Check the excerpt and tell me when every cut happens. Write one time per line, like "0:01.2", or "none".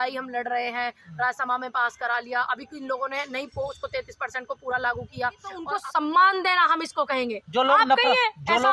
0:05.7